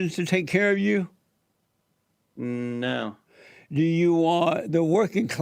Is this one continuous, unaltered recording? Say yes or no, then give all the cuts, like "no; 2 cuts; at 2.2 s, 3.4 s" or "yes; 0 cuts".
yes; 0 cuts